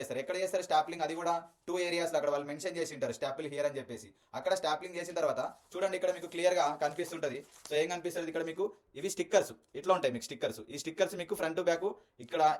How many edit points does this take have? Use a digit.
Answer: 0